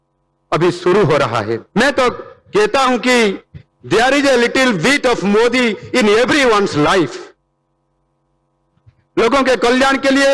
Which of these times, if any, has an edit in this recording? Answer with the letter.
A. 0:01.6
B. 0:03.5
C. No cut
A